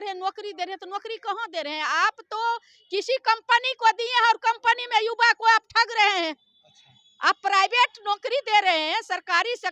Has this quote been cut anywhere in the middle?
no; 0 cuts

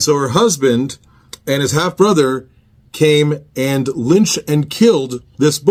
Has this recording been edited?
no; 0 cuts

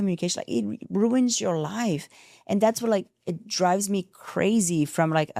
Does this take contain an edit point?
no; 0 cuts

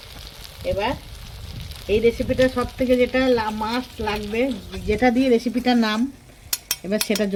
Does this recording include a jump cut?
no; 0 cuts

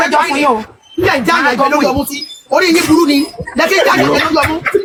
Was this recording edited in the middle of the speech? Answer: no; 0 cuts

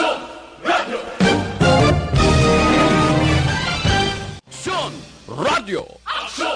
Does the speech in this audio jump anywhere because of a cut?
yes; 1 cut; at 4.5 s

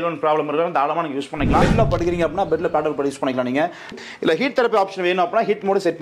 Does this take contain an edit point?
yes; 2 cuts; at 1.6 s, 4.0 s

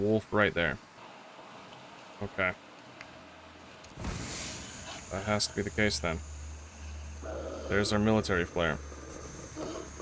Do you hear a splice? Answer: no; 0 cuts

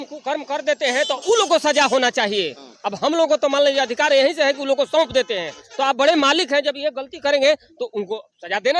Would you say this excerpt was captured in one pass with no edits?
yes; 0 cuts

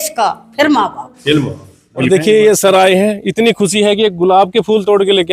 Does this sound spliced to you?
yes; 1 cut; at 2.1 s

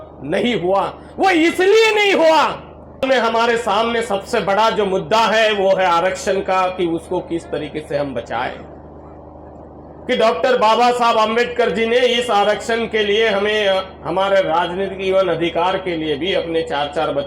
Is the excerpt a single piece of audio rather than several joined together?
no; 1 cut; at 3.0 s

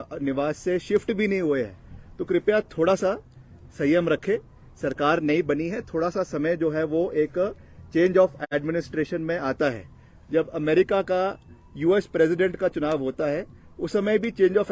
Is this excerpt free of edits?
yes; 0 cuts

